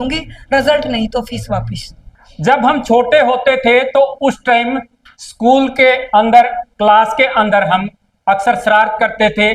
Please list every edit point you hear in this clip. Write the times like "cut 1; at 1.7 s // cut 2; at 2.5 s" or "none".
cut 1; at 2.3 s

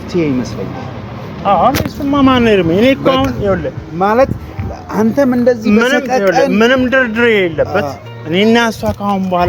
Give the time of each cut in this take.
none

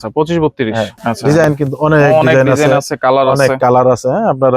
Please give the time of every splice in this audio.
cut 1; at 1.0 s

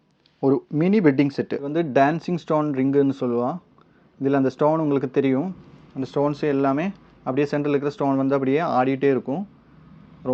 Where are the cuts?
cut 1; at 1.7 s

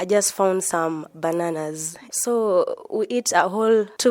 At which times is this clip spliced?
cut 1; at 2.1 s

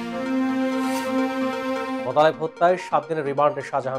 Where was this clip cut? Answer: cut 1; at 2.0 s

